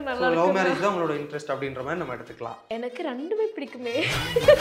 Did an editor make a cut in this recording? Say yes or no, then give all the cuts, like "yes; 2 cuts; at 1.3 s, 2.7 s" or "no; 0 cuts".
yes; 1 cut; at 2.6 s